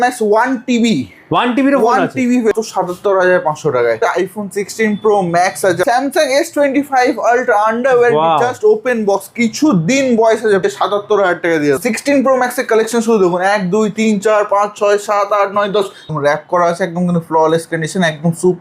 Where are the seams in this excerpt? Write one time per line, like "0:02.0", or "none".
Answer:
0:02.5
0:04.0
0:05.8
0:10.6
0:11.8
0:16.0